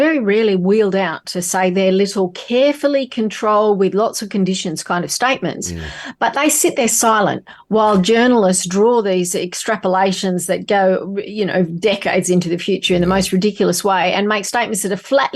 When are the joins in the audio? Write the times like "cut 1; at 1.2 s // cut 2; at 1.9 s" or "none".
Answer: none